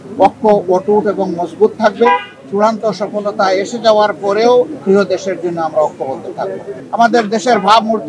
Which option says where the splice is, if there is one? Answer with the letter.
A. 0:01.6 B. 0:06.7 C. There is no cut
B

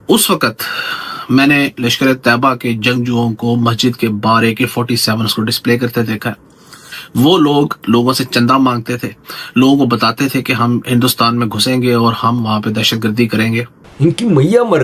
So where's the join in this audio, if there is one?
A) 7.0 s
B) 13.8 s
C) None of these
B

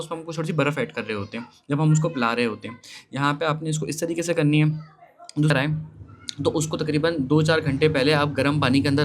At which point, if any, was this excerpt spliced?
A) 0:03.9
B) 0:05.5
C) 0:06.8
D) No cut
B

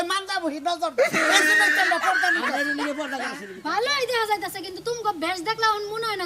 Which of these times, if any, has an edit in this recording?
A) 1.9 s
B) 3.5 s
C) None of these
B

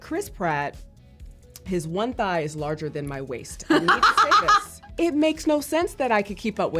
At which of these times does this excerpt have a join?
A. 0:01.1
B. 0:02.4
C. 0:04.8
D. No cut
C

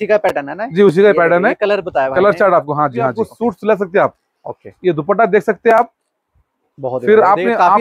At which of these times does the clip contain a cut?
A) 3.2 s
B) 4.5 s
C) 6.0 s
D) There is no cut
A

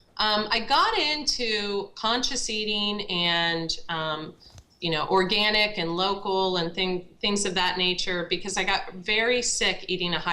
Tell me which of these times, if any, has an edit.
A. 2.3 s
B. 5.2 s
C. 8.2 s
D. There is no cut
B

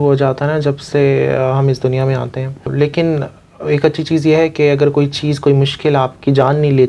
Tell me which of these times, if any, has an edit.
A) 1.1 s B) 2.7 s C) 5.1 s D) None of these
B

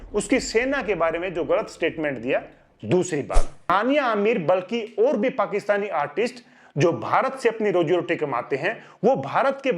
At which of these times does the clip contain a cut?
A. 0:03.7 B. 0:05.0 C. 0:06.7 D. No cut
A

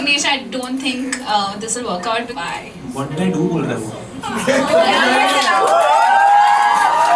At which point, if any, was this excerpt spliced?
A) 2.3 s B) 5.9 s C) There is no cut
A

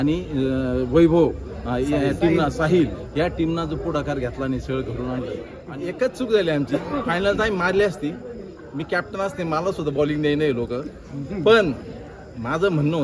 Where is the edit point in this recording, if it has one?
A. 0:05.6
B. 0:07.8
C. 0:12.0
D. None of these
A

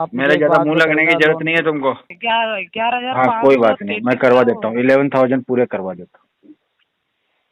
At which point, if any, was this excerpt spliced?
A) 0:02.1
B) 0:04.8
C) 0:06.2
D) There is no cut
A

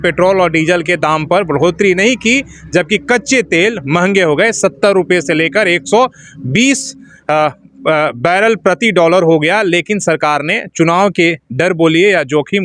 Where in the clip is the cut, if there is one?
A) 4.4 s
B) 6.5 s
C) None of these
C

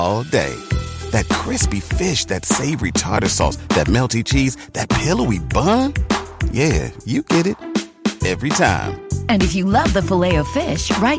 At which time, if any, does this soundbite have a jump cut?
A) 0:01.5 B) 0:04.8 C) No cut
C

